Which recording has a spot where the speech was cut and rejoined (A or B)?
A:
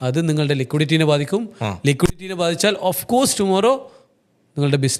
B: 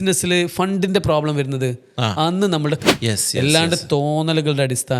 B